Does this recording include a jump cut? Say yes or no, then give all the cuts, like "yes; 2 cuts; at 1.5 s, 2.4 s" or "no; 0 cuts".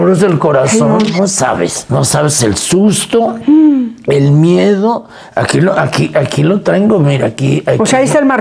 yes; 1 cut; at 1.1 s